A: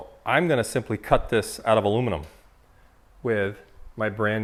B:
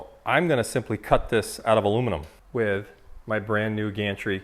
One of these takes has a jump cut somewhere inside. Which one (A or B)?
B